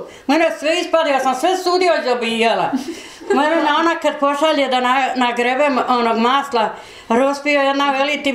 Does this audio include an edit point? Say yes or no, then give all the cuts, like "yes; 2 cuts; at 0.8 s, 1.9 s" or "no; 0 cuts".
yes; 1 cut; at 3.2 s